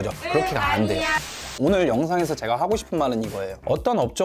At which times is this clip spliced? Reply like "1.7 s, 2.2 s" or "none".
1.3 s